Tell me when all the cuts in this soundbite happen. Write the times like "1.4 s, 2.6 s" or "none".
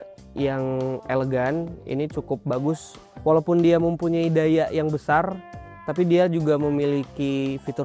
3.2 s